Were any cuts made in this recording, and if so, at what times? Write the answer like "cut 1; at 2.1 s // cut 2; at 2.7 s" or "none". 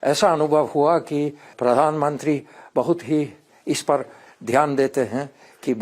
cut 1; at 1.5 s // cut 2; at 3.5 s